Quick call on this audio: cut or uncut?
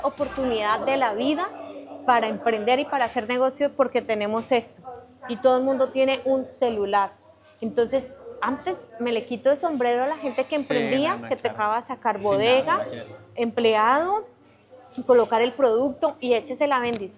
uncut